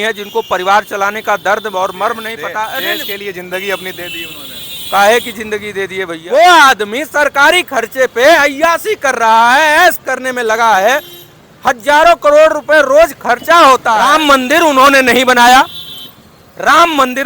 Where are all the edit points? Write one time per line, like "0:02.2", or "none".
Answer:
0:06.1
0:14.0

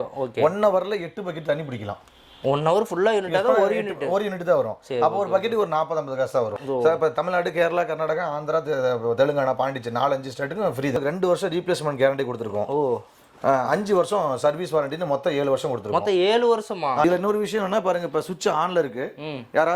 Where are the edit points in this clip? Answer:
0:06.5
0:10.9
0:17.0

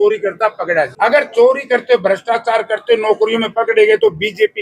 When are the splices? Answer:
0:00.9

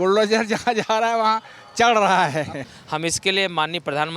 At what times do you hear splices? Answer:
0:02.7

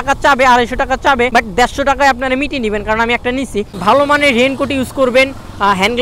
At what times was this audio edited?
0:01.3
0:03.7

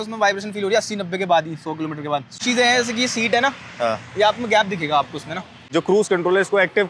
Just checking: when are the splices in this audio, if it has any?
0:02.3
0:05.5

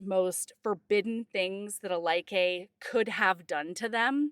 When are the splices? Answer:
none

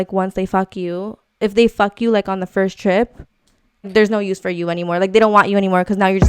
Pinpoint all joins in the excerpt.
0:03.9

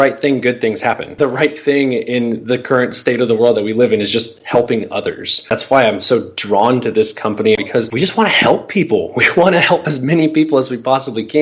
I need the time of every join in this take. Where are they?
0:01.1
0:05.5
0:07.6

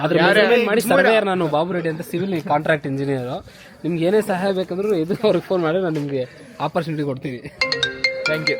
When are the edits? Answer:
none

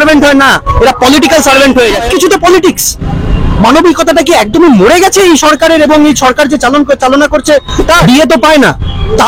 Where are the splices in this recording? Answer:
0:02.0
0:08.0

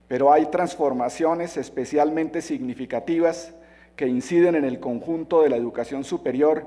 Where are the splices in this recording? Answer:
0:05.3

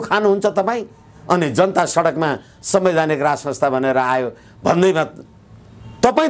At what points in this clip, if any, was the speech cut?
none

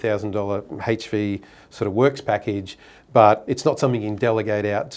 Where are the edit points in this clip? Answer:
0:03.5

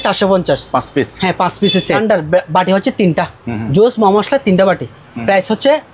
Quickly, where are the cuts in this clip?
0:02.0

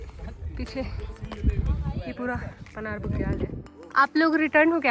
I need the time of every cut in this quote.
0:03.5

